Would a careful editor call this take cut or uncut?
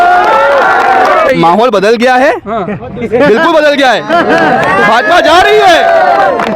cut